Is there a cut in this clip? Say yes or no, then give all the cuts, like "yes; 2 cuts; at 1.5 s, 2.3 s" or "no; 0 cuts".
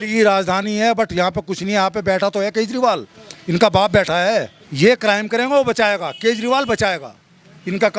yes; 1 cut; at 4.6 s